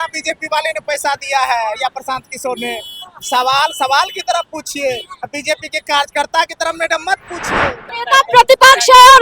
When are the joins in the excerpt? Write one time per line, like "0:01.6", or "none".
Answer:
0:07.8